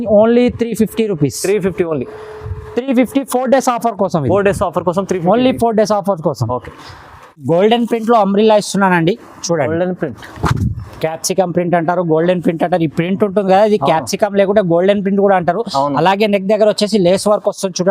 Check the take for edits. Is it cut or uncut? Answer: cut